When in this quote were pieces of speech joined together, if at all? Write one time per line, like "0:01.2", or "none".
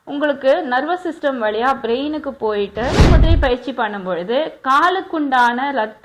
0:03.0